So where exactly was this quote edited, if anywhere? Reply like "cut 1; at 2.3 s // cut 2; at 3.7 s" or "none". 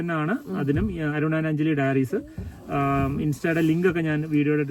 none